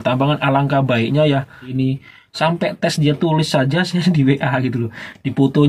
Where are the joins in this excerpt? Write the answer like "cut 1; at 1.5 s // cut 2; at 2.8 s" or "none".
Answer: cut 1; at 1.7 s